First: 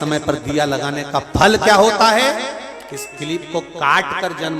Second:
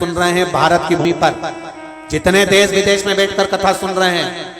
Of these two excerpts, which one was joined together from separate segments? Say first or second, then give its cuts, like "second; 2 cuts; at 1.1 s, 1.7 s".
second; 1 cut; at 1.0 s